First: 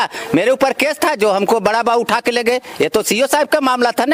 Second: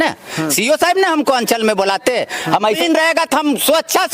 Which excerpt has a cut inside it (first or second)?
second